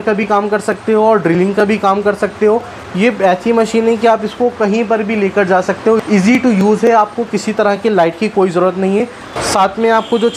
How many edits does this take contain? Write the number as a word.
zero